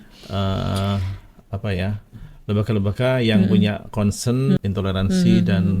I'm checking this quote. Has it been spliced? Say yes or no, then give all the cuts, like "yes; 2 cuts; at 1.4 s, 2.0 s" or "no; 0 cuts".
yes; 1 cut; at 4.6 s